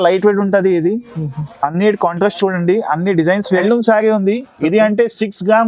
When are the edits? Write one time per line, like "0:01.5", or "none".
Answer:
0:03.6

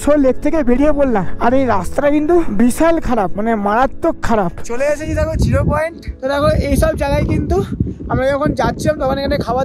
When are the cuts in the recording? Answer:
0:01.3
0:02.5
0:04.6
0:06.0

